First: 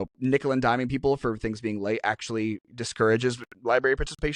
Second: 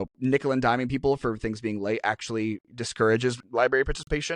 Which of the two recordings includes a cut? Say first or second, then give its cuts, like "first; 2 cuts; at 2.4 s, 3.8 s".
second; 1 cut; at 3.4 s